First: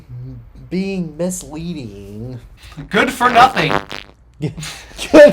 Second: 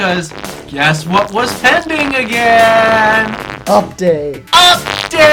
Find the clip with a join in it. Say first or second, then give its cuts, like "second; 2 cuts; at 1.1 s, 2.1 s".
first; 1 cut; at 2.6 s